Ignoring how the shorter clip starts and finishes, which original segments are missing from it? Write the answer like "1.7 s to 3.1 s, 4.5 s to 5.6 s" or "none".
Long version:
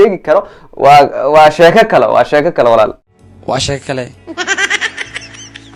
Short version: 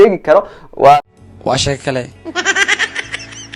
1.0 s to 3.0 s